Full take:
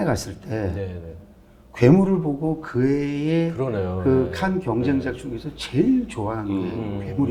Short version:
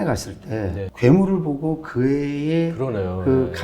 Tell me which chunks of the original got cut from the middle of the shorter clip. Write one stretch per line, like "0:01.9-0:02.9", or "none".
0:00.9-0:01.7